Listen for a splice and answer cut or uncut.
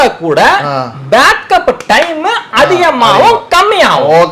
uncut